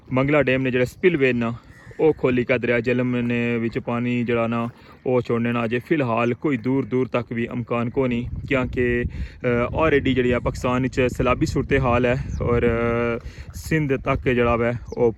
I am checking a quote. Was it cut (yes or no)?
no